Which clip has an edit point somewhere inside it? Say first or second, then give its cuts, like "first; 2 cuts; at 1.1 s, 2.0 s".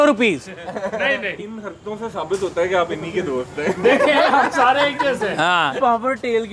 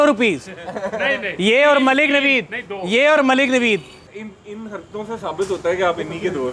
first; 2 cuts; at 1.3 s, 5.7 s